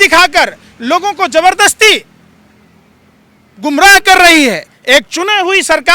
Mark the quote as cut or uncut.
uncut